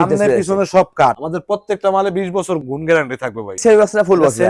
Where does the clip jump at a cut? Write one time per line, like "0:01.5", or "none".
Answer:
0:01.2
0:02.6
0:03.6